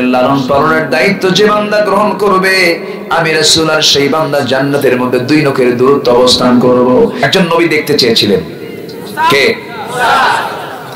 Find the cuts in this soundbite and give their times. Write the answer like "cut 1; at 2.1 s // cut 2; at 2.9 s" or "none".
cut 1; at 7.3 s